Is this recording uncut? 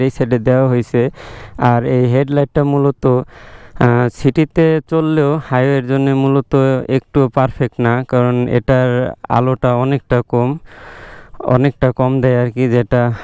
yes; 0 cuts

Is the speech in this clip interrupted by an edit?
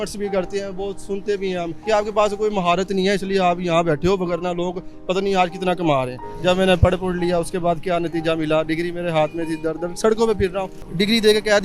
yes; 3 cuts; at 1.8 s, 6.3 s, 10.8 s

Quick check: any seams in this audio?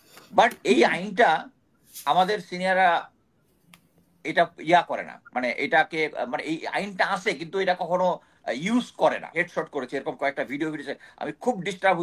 yes; 1 cut; at 9.4 s

